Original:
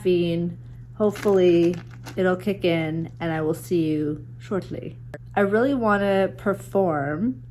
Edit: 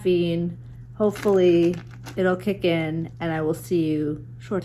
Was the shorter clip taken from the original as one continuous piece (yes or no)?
yes